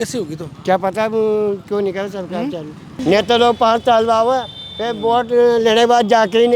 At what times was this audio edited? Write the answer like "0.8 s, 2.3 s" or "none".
3.0 s